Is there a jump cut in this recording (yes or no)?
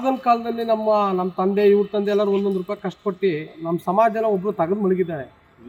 no